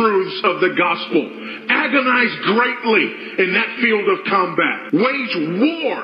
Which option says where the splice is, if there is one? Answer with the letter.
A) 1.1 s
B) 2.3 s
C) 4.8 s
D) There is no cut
D